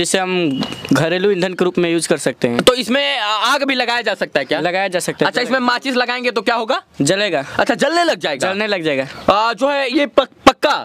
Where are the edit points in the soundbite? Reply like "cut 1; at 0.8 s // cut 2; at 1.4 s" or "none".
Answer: none